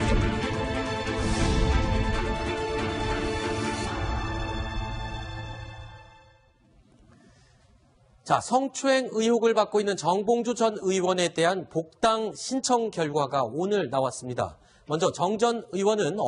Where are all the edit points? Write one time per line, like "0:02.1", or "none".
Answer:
0:04.5